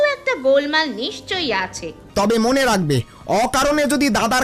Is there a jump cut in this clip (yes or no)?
yes